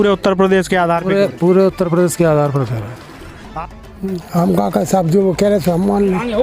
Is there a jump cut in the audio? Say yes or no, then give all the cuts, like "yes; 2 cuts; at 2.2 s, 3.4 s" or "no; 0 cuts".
yes; 1 cut; at 3.5 s